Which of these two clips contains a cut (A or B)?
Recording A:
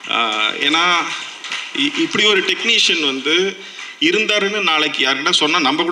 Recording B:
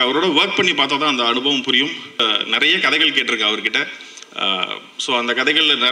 B